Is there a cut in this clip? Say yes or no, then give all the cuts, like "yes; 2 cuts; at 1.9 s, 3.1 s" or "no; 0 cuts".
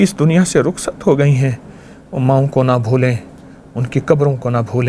no; 0 cuts